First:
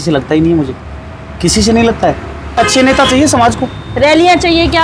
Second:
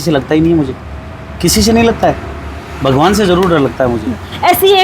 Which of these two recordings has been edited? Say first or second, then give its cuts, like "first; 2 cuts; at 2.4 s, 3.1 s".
first; 1 cut; at 2.6 s